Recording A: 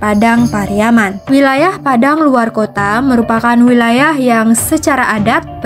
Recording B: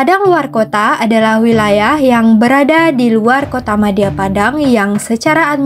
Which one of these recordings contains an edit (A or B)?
A